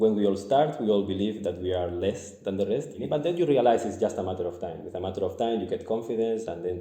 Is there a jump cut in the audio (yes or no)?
yes